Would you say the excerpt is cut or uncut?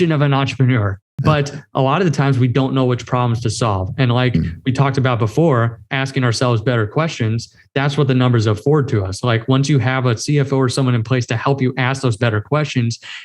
cut